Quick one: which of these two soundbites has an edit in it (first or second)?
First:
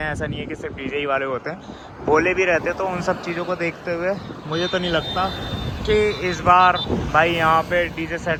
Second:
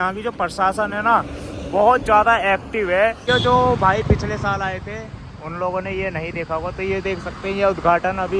second